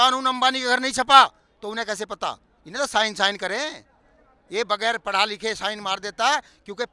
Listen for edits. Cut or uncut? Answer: uncut